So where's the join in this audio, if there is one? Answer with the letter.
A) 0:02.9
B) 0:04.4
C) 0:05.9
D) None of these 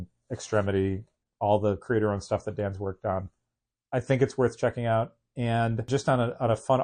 C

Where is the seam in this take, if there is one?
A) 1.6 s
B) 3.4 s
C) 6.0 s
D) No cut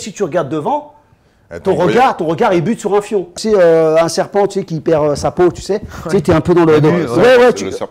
B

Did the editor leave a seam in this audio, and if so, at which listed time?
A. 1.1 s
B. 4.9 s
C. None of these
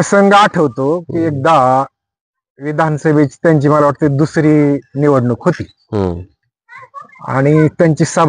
C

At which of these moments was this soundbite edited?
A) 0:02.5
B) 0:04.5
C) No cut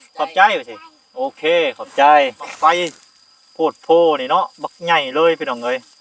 A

